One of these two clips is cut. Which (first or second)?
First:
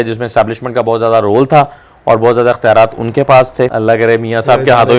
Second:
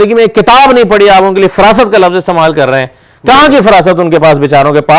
first